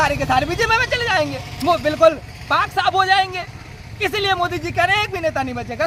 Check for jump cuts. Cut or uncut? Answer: uncut